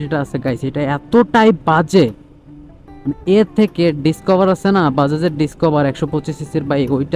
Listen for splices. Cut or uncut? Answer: uncut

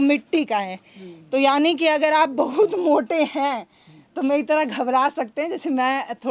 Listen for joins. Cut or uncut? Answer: uncut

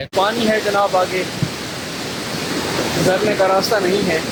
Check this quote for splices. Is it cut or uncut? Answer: uncut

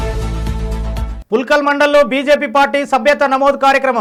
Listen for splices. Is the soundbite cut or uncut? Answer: uncut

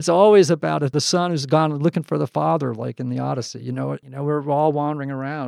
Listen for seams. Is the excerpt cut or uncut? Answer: cut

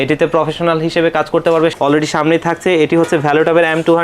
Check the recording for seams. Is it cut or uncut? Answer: cut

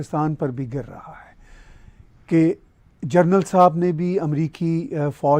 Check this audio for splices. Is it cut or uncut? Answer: uncut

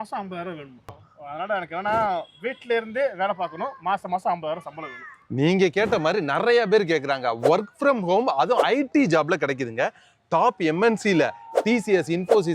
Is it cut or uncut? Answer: cut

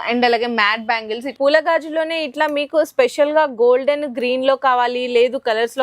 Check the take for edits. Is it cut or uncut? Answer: cut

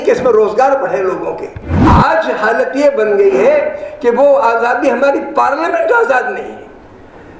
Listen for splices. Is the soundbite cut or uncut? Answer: cut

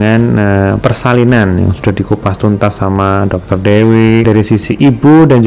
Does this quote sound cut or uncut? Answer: cut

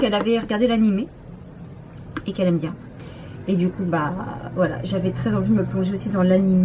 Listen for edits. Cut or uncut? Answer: cut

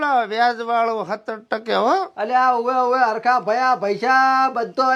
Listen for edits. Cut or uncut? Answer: uncut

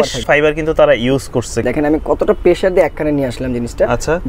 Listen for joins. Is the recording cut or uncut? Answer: cut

